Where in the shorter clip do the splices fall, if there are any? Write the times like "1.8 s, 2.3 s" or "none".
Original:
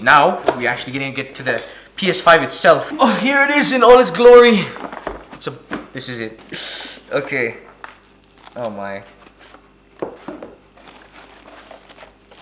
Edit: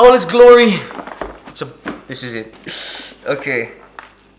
none